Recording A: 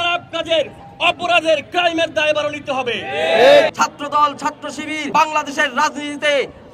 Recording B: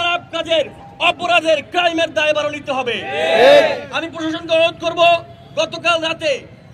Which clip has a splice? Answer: A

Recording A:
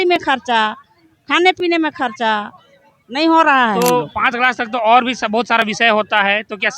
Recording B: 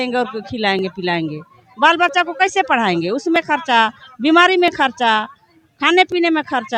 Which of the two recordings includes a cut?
A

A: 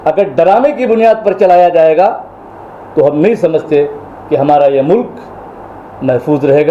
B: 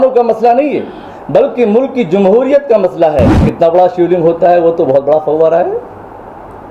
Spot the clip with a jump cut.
B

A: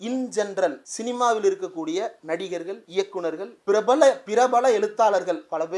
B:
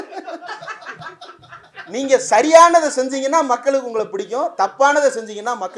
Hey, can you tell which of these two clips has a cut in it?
A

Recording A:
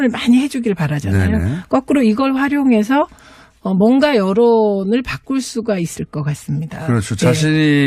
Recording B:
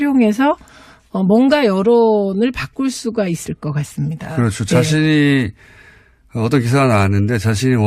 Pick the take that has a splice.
A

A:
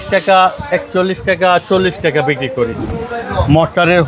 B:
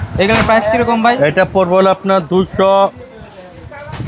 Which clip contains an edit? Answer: A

